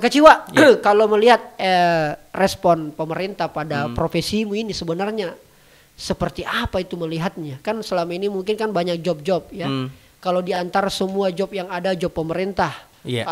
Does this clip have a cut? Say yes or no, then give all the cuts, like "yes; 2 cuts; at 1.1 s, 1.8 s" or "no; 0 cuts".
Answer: no; 0 cuts